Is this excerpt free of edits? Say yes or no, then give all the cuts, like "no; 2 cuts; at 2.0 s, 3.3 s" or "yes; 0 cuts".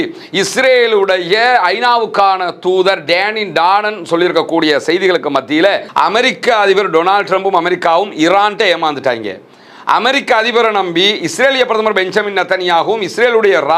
no; 1 cut; at 5.8 s